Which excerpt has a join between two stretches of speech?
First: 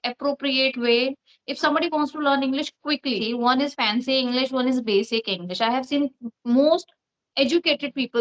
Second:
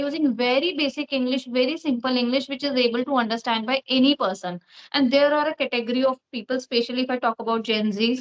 first; 1 cut; at 3.2 s

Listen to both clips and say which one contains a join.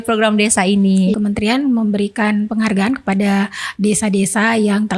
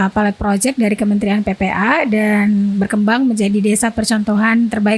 first; 1 cut; at 1.1 s

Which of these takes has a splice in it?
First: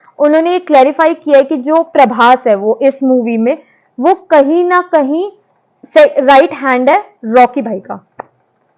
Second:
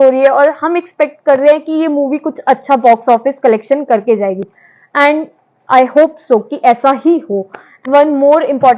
second; 1 cut; at 7.8 s

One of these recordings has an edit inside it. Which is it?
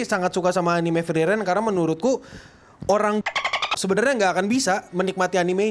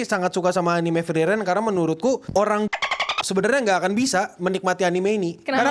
second; 1 cut; at 2.2 s

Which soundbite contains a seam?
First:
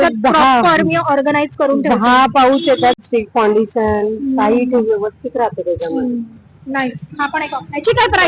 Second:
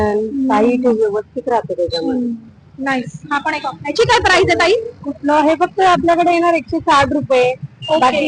first; 1 cut; at 2.9 s

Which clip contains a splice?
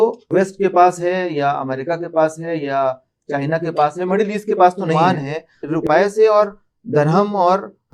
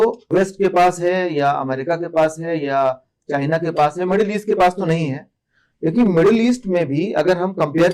first; 1 cut; at 4.9 s

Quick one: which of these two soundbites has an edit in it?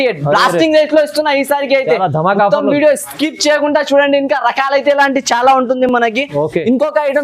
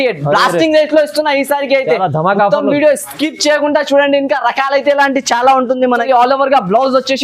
second; 1 cut; at 5.9 s

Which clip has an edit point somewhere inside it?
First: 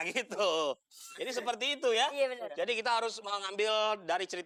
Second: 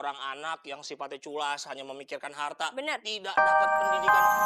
second; 1 cut; at 3.3 s

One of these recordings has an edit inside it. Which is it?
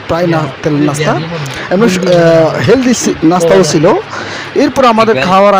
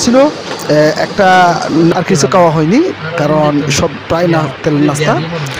second; 1 cut; at 1.9 s

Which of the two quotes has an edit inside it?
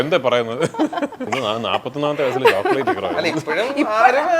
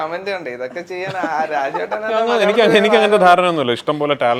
first; 1 cut; at 1.3 s

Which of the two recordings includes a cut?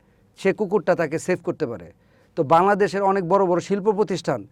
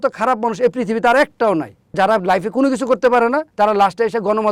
second; 2 cuts; at 1.9 s, 3.5 s

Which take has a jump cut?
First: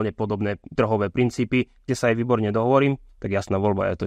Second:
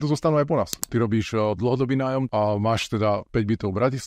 second; 3 cuts; at 0.9 s, 2.3 s, 3.3 s

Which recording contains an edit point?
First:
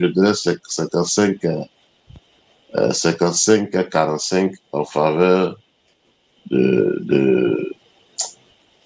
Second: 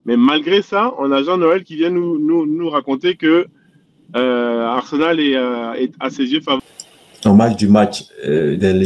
second; 1 cut; at 6.6 s

